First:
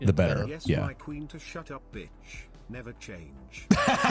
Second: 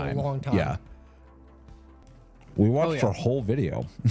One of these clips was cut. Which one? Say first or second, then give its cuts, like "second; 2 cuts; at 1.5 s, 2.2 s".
second; 1 cut; at 2.0 s